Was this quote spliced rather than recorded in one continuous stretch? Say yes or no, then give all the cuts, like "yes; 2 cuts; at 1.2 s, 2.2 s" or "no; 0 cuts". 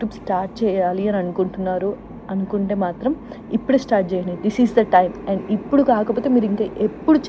no; 0 cuts